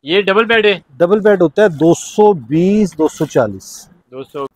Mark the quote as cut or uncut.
uncut